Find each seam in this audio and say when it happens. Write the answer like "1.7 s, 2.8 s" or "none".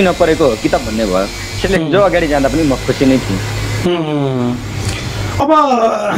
none

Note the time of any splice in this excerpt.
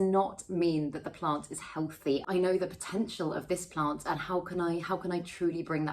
2.2 s

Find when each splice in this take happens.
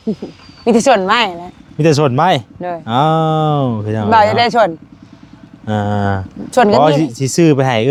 none

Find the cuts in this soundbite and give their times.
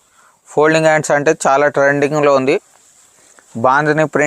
2.4 s

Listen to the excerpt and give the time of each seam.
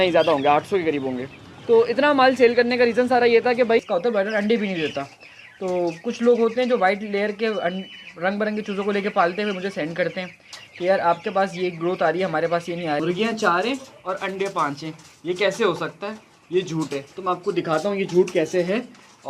3.8 s, 13.0 s

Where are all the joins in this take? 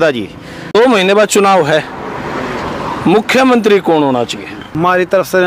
1.0 s, 4.7 s

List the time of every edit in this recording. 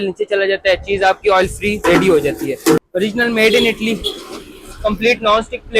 2.8 s

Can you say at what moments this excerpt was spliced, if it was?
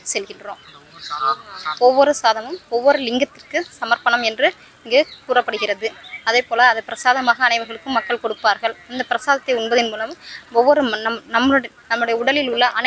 none

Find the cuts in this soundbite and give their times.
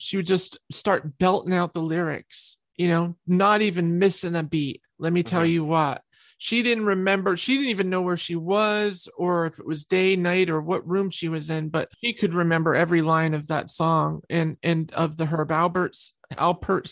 12.0 s

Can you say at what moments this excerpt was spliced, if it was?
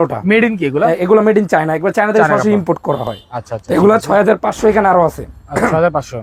none

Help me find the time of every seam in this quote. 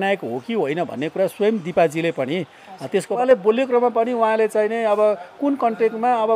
3.2 s

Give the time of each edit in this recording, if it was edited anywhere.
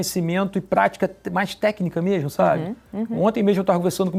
none

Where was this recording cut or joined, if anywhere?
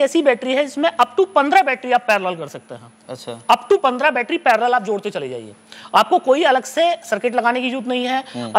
none

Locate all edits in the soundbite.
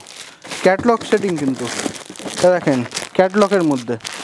none

